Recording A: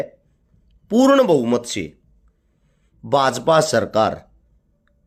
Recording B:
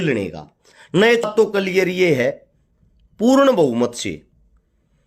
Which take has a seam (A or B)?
B